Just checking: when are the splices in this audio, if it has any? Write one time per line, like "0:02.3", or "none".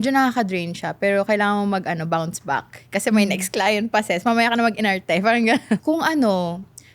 0:05.8